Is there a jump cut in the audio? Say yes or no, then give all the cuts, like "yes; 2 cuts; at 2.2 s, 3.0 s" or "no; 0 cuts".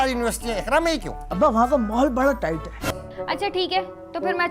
yes; 1 cut; at 2.9 s